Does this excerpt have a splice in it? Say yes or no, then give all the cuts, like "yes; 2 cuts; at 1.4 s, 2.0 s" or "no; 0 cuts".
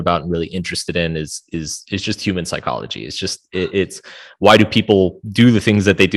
no; 0 cuts